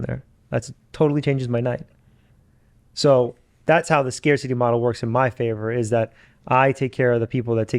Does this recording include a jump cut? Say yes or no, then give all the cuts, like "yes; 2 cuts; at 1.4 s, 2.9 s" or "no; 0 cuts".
no; 0 cuts